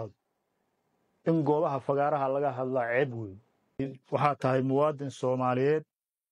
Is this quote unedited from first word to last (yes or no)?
no